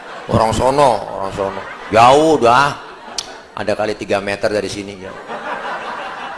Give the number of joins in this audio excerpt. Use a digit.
0